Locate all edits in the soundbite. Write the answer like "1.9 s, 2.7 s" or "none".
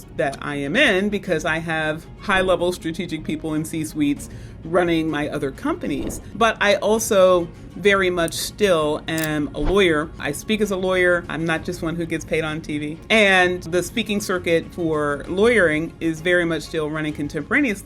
6.2 s, 10.2 s, 11.3 s, 13.0 s, 13.7 s